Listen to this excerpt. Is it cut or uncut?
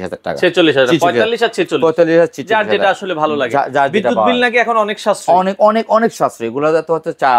uncut